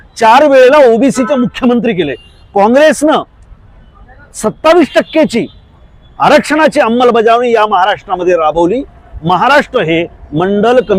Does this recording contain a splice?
no; 0 cuts

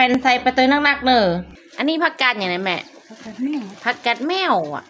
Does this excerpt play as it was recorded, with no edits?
no; 1 cut; at 1.6 s

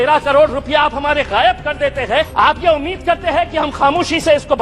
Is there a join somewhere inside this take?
yes; 1 cut; at 2.3 s

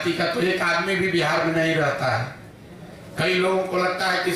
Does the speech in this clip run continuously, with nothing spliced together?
yes; 0 cuts

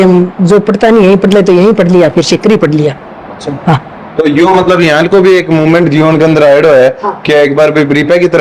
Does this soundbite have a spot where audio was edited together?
no; 0 cuts

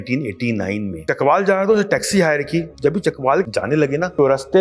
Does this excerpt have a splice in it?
yes; 3 cuts; at 0.9 s, 2.7 s, 3.5 s

